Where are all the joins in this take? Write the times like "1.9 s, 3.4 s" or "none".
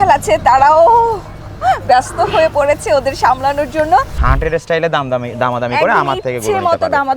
4.2 s